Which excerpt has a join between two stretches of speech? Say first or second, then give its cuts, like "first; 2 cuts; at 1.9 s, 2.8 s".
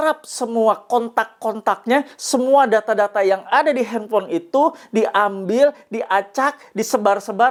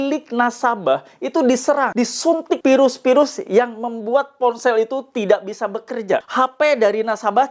second; 2 cuts; at 2.3 s, 6.3 s